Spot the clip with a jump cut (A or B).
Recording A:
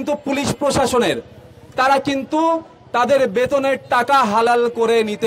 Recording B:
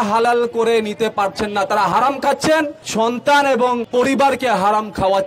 B